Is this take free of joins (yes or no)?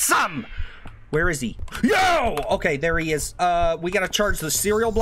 no